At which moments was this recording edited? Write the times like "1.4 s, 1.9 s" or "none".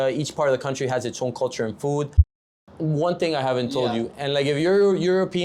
2.3 s

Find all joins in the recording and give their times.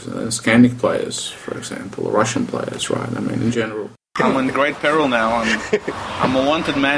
4.1 s

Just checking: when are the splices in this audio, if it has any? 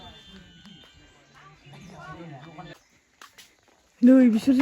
2.7 s

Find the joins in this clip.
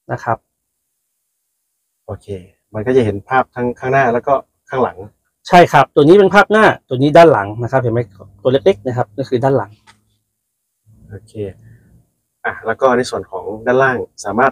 none

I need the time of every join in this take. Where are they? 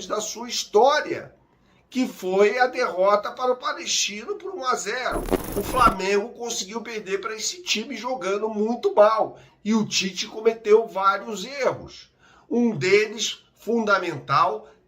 5.4 s

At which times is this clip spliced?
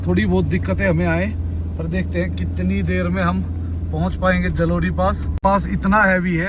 5.3 s

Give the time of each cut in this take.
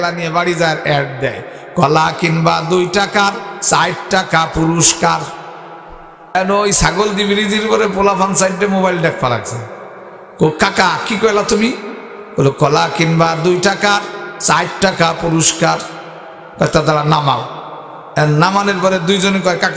6.3 s

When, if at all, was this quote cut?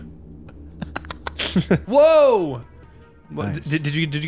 1.8 s

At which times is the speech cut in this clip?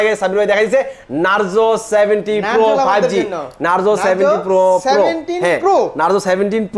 none

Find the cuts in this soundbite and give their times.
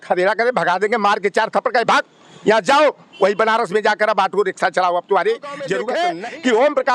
5.8 s

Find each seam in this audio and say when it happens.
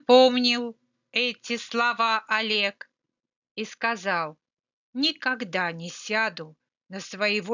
1.2 s

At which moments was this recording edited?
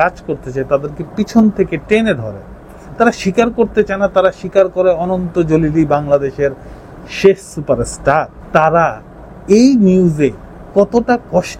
8.4 s

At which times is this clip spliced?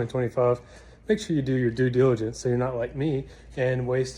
none

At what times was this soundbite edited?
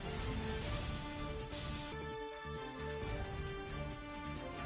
none

